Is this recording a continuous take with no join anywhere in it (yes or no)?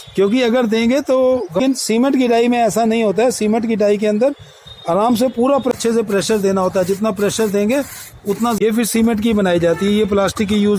no